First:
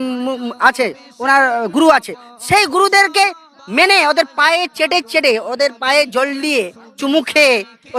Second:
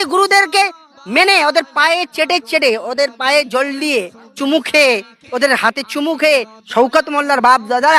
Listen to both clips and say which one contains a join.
second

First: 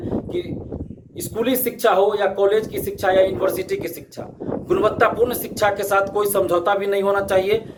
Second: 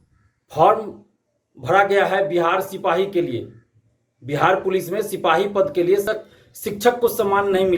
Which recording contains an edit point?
second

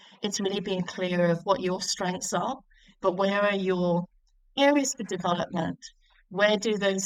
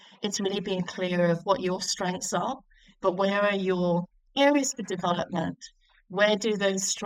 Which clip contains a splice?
second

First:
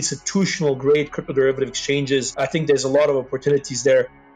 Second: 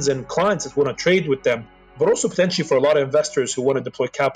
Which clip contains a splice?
first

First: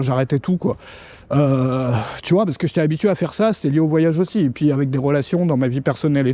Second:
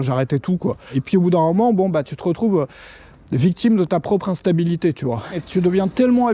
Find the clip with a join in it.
second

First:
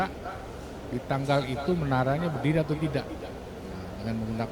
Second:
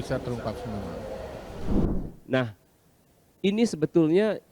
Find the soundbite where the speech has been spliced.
second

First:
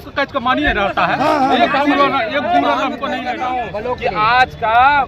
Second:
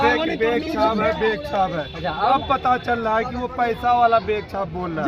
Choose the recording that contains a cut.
first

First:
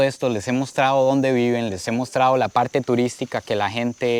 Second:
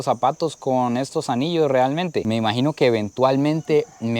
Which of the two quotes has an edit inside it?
second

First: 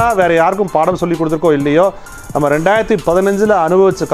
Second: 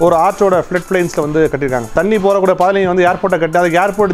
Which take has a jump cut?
second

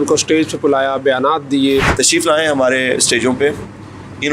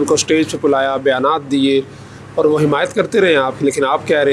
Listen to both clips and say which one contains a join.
first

